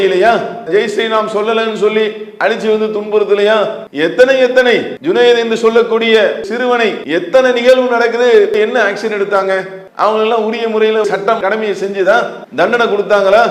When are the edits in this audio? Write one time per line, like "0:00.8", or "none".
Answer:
0:03.8
0:04.9
0:06.5
0:08.5